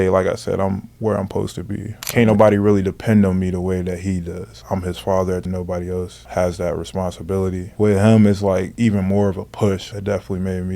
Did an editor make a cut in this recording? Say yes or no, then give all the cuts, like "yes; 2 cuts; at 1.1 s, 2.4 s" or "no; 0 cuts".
yes; 4 cuts; at 2.0 s, 5.4 s, 7.7 s, 9.9 s